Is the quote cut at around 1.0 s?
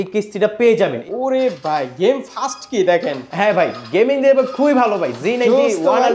yes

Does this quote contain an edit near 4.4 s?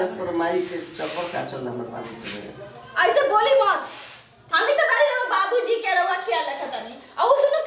yes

